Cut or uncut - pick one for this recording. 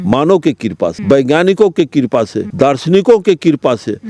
cut